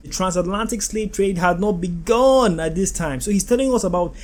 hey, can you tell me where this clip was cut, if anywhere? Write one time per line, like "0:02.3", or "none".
none